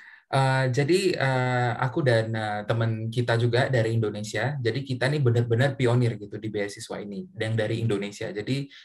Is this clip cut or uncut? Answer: uncut